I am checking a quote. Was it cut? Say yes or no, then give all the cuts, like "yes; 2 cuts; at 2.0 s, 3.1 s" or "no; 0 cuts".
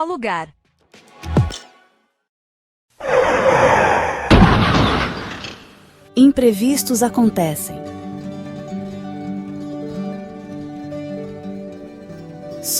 yes; 1 cut; at 2.3 s